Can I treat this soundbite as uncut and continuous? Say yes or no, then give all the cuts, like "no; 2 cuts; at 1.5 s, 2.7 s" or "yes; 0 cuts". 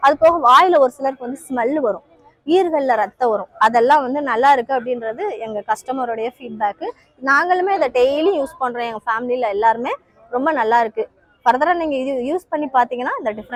yes; 0 cuts